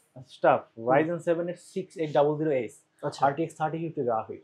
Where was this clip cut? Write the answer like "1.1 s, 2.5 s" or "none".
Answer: none